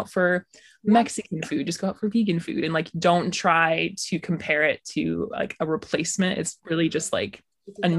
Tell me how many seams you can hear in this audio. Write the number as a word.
one